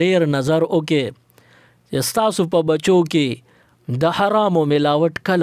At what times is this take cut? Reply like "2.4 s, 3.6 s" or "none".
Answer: none